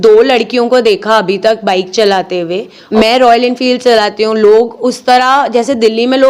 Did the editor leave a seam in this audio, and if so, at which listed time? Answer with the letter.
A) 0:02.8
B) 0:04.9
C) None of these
A